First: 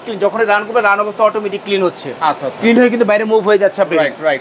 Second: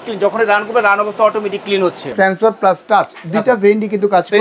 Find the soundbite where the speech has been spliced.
second; 1 cut; at 2.1 s

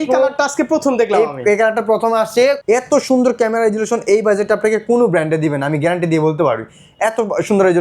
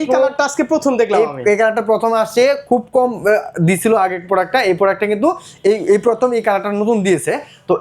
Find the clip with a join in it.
first; 1 cut; at 2.6 s

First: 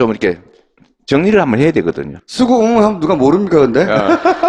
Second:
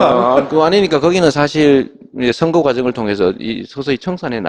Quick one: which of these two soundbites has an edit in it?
second; 1 cut; at 3.2 s

